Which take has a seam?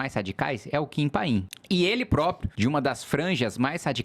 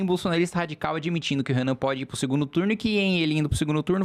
first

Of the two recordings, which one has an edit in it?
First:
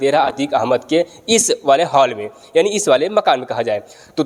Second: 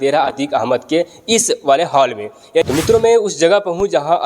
second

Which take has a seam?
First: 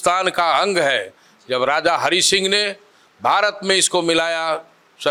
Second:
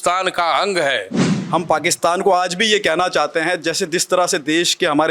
second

